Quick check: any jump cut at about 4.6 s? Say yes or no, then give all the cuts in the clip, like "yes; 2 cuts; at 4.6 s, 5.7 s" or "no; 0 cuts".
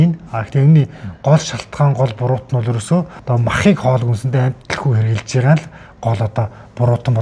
yes; 2 cuts; at 3.2 s, 4.6 s